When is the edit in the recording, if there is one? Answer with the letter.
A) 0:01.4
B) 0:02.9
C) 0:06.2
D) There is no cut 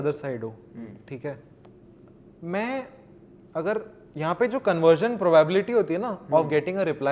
D